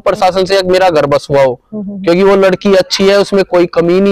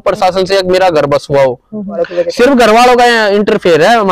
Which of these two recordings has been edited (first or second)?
second